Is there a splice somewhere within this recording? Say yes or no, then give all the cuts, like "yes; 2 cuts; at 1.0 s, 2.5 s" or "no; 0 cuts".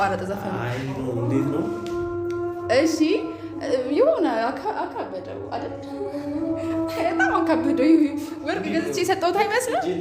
no; 0 cuts